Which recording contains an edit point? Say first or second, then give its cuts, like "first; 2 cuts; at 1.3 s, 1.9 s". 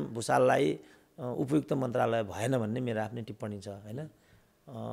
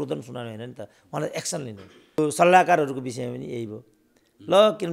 second; 1 cut; at 2.2 s